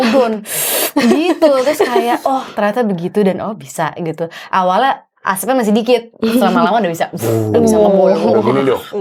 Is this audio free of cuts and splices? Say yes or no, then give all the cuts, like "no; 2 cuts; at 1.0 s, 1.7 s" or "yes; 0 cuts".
yes; 0 cuts